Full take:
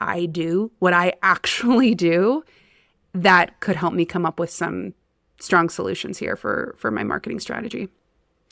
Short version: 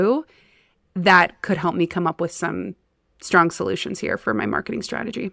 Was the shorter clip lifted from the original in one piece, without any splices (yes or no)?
no